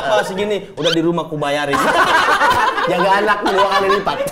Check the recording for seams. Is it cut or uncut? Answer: uncut